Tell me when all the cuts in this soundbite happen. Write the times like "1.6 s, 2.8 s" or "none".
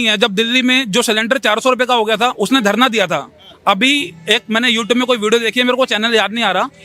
none